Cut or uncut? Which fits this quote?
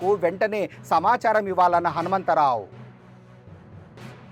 uncut